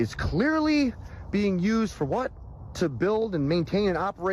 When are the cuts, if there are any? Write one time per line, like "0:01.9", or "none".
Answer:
none

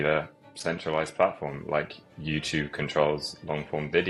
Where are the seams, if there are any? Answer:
none

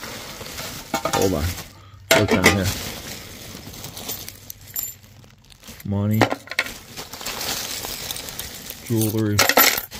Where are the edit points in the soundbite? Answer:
none

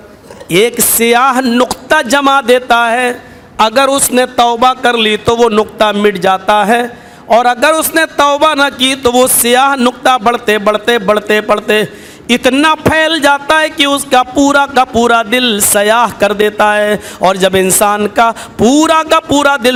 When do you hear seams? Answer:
none

